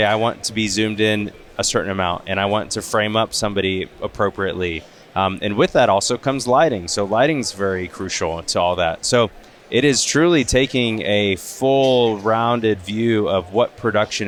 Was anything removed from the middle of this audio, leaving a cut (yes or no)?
no